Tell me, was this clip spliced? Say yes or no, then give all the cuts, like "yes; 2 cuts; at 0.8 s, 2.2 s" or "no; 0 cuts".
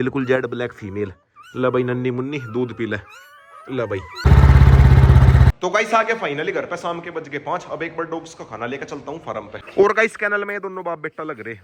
no; 0 cuts